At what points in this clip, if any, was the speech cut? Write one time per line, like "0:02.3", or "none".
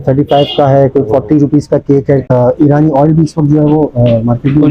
0:02.3